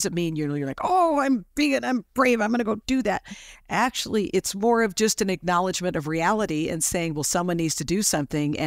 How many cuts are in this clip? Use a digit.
0